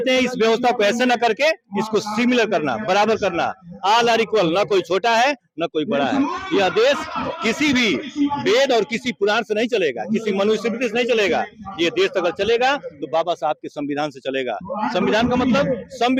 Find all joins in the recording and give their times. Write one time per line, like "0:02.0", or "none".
none